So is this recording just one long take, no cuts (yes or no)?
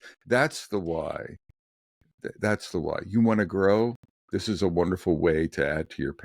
yes